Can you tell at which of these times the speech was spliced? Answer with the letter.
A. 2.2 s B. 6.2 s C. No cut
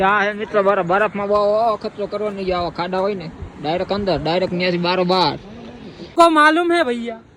B